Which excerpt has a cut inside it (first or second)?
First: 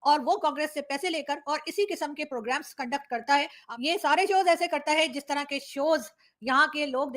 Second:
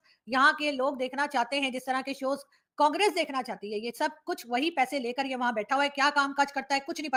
first